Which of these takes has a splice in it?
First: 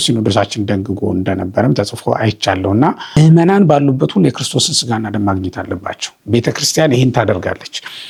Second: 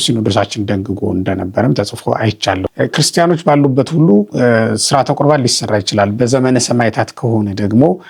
second; 1 cut; at 2.6 s

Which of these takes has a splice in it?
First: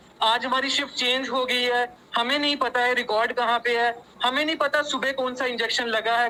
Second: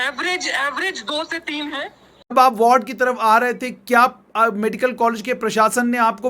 second; 1 cut; at 2.2 s

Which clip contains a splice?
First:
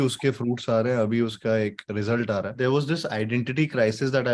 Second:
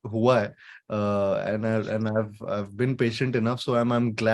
first; 1 cut; at 2.5 s

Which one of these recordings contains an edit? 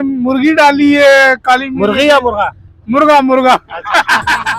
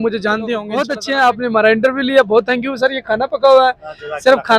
second; 1 cut; at 0.9 s

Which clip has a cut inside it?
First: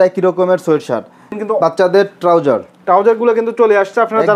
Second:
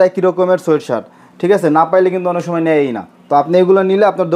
first; 1 cut; at 1.4 s

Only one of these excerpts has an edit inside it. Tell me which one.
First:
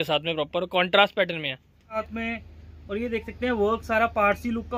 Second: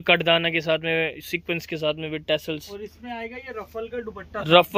first; 1 cut; at 2.0 s

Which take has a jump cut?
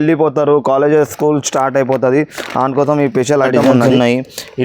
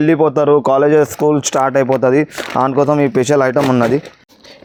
first; 1 cut; at 3.6 s

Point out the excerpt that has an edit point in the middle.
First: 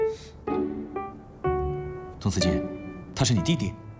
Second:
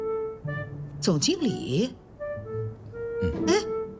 first; 1 cut; at 2.1 s

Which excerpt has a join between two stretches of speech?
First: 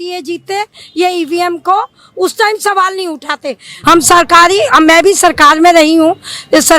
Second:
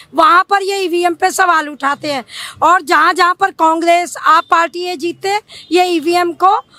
first; 1 cut; at 3.7 s

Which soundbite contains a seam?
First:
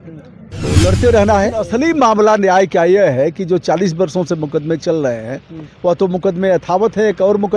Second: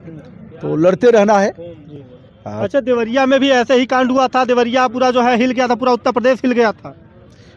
first; 1 cut; at 1.6 s

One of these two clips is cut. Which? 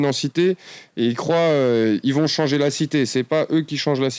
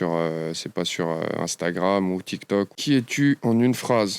second; 1 cut; at 2.7 s

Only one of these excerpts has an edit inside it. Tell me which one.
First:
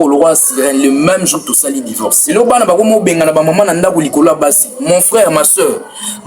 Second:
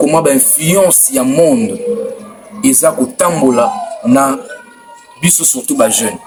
first; 1 cut; at 2.1 s

